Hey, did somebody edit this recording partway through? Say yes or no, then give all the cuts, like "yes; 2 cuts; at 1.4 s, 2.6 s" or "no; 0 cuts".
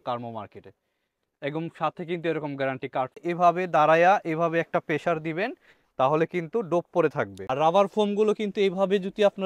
yes; 2 cuts; at 3.2 s, 7.5 s